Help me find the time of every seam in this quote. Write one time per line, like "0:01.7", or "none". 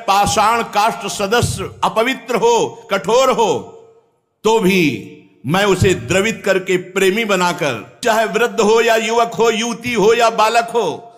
0:08.0